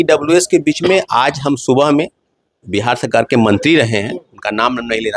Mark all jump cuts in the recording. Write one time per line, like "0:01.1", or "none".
none